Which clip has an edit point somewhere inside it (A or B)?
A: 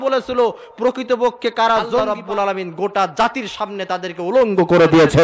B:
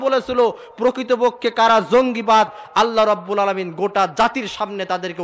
A